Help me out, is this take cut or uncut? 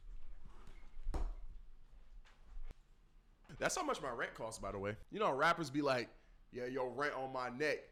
uncut